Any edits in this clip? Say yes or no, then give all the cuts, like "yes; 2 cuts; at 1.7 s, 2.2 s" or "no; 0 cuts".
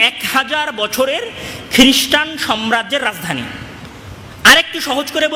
no; 0 cuts